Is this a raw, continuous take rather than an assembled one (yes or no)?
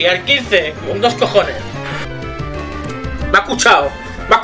no